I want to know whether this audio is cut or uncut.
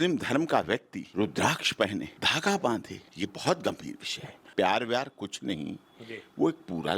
cut